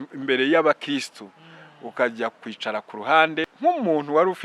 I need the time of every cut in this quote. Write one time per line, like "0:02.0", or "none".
0:03.5

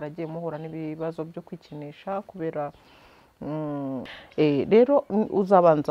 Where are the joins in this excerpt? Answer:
0:04.1

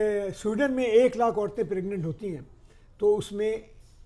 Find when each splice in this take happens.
none

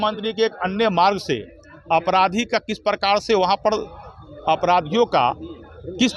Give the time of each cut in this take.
none

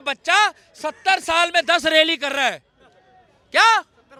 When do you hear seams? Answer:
none

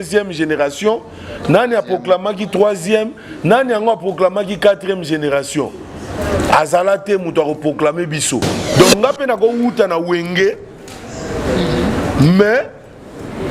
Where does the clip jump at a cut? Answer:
0:08.7

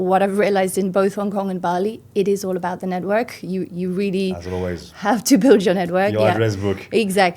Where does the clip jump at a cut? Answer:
none

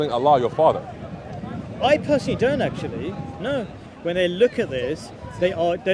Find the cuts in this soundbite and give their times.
0:03.8

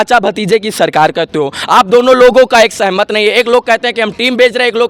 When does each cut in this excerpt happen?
none

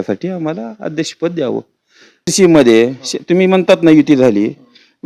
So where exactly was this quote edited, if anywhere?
0:02.3

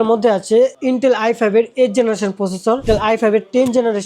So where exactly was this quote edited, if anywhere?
0:02.8

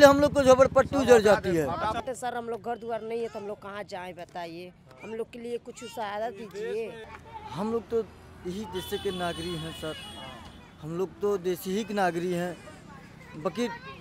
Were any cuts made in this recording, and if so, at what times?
0:02.0
0:06.9

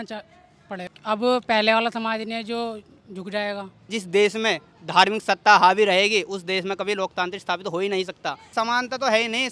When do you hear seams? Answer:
0:00.9
0:03.9
0:08.4

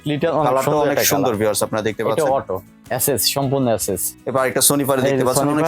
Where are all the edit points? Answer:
0:02.7
0:04.1

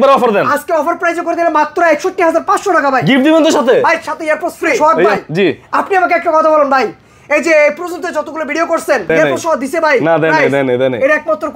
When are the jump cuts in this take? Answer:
0:05.1
0:09.1

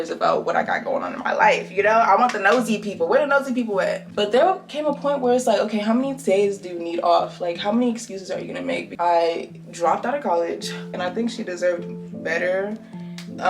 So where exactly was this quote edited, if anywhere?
0:04.0
0:08.9
0:10.9

